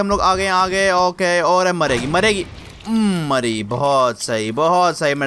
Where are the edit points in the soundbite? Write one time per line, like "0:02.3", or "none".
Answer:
none